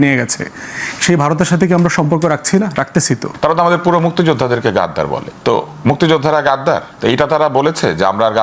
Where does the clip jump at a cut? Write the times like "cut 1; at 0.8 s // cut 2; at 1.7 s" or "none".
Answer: cut 1; at 3.3 s // cut 2; at 5.3 s // cut 3; at 6.9 s